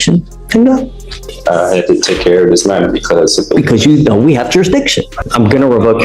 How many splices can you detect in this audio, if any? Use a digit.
1